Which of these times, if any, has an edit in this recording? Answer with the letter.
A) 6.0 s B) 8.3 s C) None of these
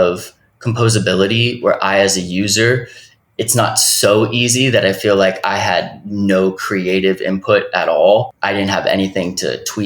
B